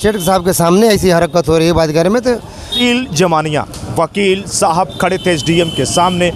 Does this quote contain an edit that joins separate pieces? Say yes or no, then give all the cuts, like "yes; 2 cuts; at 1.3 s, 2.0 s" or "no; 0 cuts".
yes; 1 cut; at 2.8 s